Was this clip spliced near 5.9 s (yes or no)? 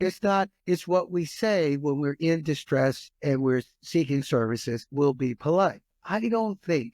yes